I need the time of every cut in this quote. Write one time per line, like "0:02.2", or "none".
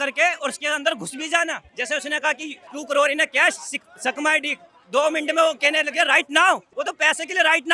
0:01.7
0:02.6
0:06.7